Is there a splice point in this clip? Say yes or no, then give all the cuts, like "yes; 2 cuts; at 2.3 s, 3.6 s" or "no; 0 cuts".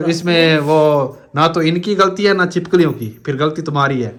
no; 0 cuts